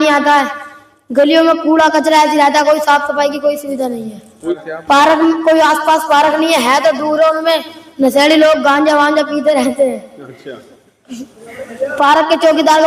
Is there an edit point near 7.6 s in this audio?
no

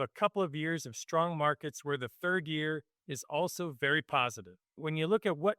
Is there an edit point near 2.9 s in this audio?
no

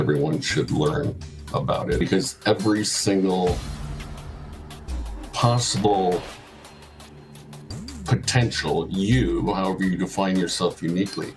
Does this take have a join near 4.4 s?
no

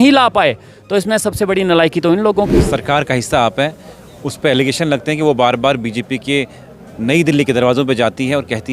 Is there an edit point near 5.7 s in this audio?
no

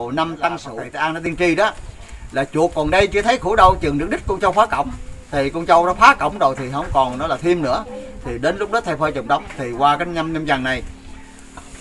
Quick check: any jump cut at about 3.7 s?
no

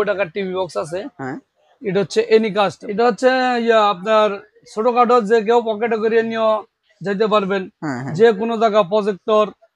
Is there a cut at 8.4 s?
no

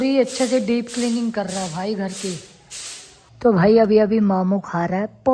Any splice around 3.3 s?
yes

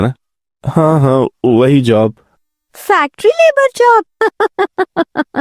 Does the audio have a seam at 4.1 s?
yes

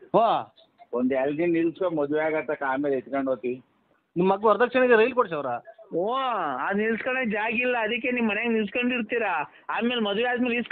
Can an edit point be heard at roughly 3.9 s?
yes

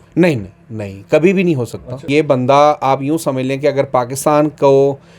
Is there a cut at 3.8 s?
no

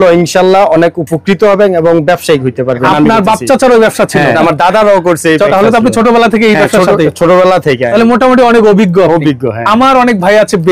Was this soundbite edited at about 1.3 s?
no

